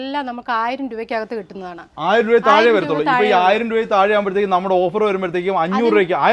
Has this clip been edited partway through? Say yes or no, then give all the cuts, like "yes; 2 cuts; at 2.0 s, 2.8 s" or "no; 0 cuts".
no; 0 cuts